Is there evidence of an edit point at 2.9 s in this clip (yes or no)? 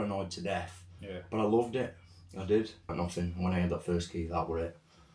yes